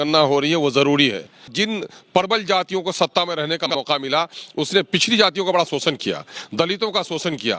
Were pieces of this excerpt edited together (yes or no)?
yes